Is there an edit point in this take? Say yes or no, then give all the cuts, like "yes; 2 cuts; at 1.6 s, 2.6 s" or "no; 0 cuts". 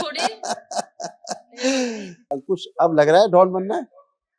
yes; 1 cut; at 2.3 s